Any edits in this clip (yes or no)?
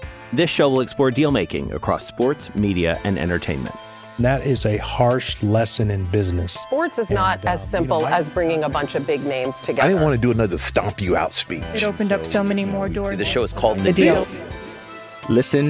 no